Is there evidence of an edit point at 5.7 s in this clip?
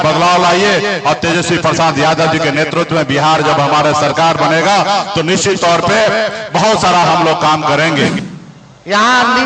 no; 1 cut; at 8.2 s

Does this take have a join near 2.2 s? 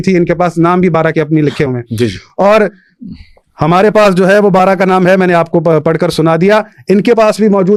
no; 0 cuts

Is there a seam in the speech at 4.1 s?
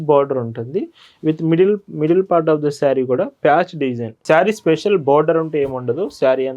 yes; 1 cut; at 4.1 s

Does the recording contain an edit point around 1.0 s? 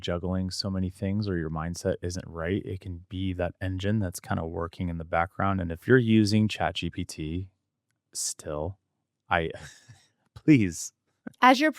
no; 1 cut; at 5.8 s

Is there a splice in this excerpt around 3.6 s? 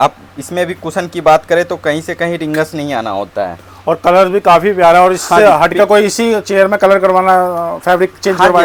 no; 0 cuts

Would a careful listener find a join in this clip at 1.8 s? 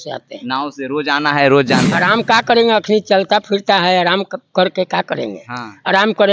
yes; 1 cut; at 1.8 s

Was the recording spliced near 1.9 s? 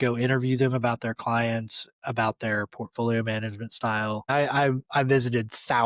no; 1 cut; at 4.3 s

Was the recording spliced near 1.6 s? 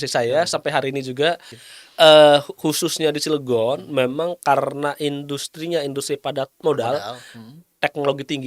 yes; 1 cut; at 1.6 s

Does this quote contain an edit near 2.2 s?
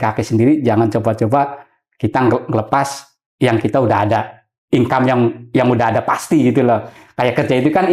no; 0 cuts

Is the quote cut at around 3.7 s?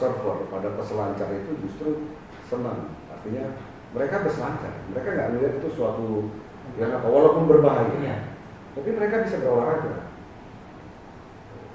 no; 0 cuts

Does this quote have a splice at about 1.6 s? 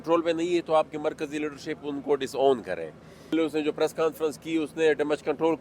no; 1 cut; at 3.3 s

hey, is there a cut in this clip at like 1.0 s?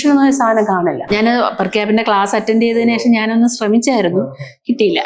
yes; 1 cut; at 1.0 s

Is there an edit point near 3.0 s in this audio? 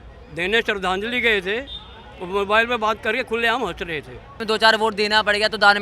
no; 1 cut; at 4.4 s

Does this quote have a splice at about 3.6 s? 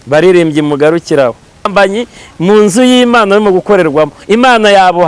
no; 1 cut; at 1.7 s

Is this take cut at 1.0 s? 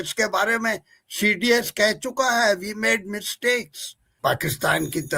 no; 1 cut; at 4.1 s

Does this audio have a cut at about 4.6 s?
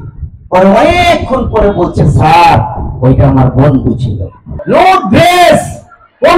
yes; 1 cut; at 4.6 s

